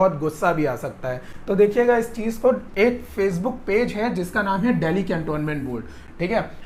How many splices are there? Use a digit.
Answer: 0